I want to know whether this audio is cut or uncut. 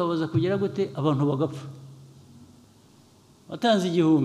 cut